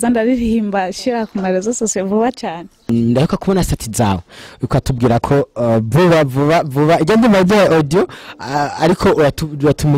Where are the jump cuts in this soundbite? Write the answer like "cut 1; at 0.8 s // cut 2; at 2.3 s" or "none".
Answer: cut 1; at 2.9 s